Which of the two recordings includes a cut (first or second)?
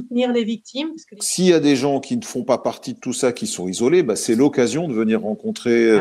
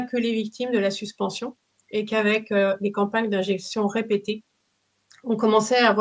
first